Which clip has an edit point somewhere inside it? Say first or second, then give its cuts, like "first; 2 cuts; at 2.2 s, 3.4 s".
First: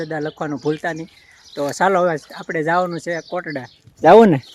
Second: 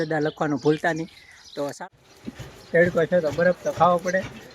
second; 1 cut; at 1.6 s